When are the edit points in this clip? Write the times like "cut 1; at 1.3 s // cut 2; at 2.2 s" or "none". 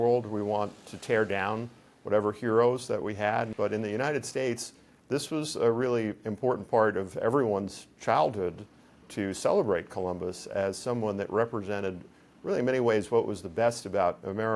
cut 1; at 3.5 s // cut 2; at 9.0 s